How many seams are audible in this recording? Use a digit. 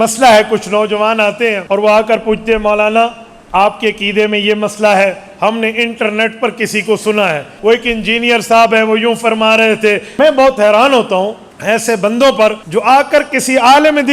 5